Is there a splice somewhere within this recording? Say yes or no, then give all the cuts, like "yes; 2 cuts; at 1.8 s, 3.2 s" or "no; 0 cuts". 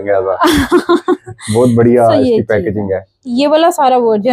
yes; 1 cut; at 3.3 s